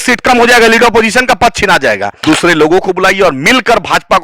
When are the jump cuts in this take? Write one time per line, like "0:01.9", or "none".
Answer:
0:02.1